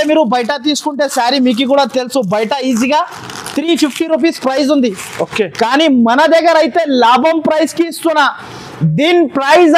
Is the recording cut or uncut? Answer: uncut